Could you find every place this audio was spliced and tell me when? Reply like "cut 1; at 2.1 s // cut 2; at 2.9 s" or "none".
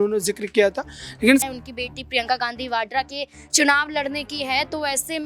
cut 1; at 1.4 s